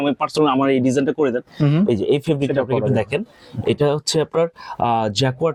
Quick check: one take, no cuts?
yes; 0 cuts

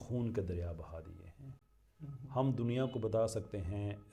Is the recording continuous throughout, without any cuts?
yes; 0 cuts

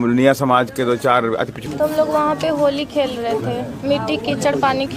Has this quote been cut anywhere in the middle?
yes; 1 cut; at 1.6 s

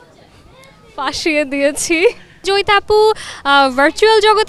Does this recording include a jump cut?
yes; 1 cut; at 2.4 s

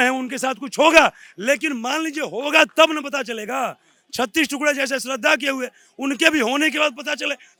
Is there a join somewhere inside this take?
no; 0 cuts

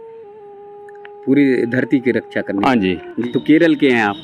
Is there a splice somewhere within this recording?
yes; 1 cut; at 3.1 s

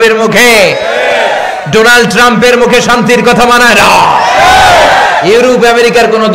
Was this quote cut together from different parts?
no; 0 cuts

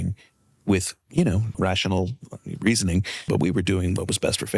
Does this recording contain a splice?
yes; 2 cuts; at 1.6 s, 3.3 s

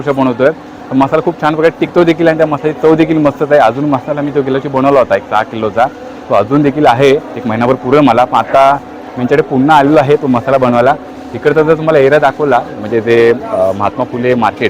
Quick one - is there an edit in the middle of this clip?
no; 0 cuts

